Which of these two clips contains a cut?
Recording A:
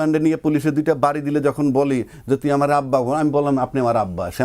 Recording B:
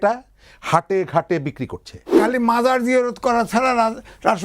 B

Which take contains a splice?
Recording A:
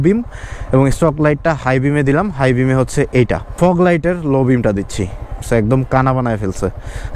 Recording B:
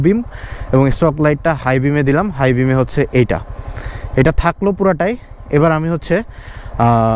A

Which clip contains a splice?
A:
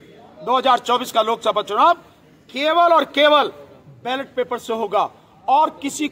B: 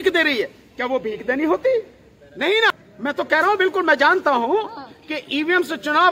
B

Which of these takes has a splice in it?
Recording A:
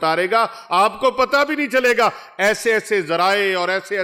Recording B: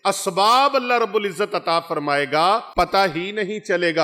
B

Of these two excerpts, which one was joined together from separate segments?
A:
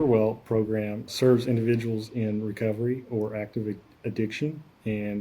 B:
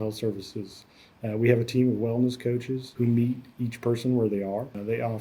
A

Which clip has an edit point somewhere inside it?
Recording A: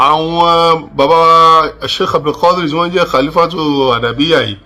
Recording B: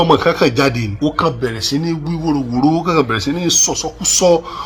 B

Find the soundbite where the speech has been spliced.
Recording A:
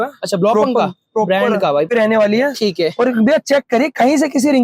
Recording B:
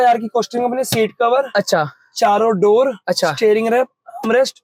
A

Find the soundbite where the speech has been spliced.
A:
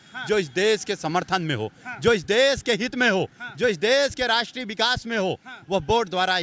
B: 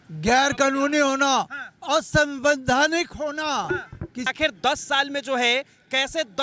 B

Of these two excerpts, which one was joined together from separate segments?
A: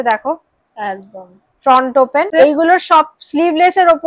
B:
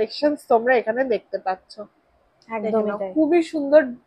A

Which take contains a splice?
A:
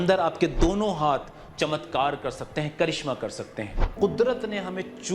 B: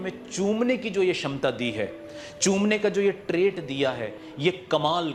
A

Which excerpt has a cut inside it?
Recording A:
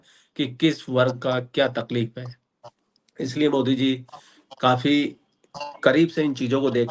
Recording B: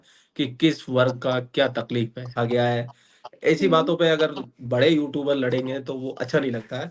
B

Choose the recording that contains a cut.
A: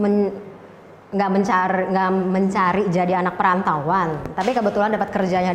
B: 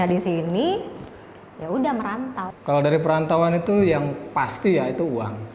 B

